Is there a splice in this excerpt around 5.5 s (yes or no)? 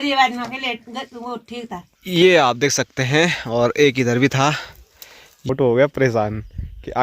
yes